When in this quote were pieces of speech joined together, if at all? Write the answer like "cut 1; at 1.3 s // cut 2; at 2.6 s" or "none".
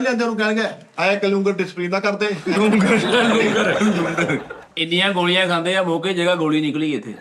cut 1; at 4.6 s